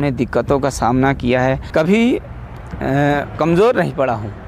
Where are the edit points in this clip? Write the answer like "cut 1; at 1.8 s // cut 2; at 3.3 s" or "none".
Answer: cut 1; at 1.7 s